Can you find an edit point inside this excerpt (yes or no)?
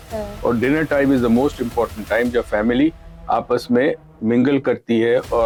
no